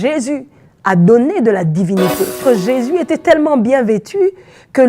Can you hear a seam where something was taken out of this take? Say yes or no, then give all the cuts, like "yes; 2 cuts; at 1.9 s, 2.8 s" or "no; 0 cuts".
yes; 1 cut; at 2.4 s